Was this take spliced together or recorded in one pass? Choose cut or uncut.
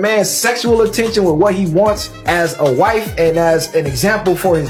uncut